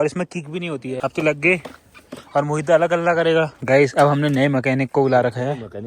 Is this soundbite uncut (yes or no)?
no